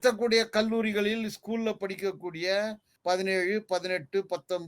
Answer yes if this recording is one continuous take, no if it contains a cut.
no